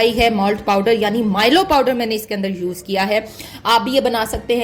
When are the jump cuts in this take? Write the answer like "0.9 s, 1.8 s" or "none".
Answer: none